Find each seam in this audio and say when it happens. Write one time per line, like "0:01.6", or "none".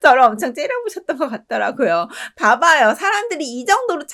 none